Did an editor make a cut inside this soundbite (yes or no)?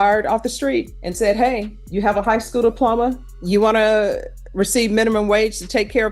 yes